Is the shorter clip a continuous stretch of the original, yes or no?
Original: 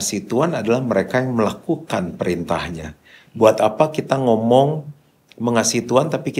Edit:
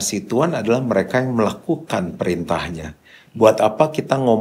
yes